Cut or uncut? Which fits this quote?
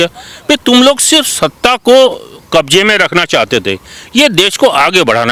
uncut